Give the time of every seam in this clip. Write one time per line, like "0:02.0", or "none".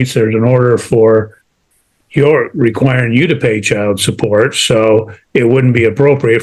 none